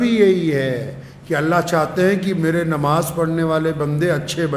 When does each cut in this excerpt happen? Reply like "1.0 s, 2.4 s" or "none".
none